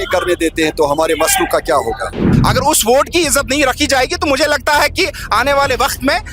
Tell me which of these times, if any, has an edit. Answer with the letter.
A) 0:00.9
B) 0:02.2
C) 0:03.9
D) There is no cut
B